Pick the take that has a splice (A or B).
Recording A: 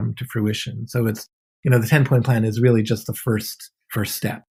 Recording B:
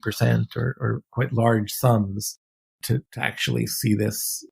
B